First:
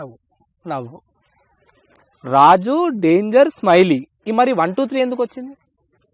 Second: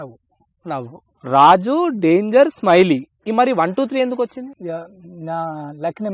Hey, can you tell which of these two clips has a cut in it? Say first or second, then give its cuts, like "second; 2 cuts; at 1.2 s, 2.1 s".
second; 2 cuts; at 1.1 s, 4.5 s